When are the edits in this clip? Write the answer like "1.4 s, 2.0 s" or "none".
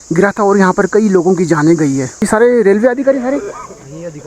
2.2 s